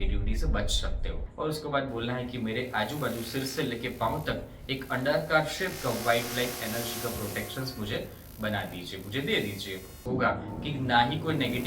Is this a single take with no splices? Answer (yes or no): no